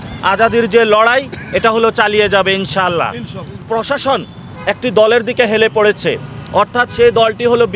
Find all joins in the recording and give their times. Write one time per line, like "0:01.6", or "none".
0:03.5